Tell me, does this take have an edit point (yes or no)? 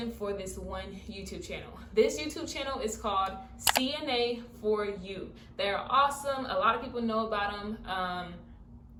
no